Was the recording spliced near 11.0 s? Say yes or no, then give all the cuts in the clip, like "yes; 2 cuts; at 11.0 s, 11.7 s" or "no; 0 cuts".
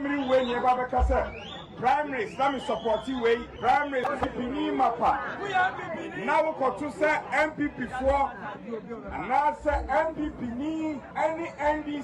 yes; 2 cuts; at 3.5 s, 11.0 s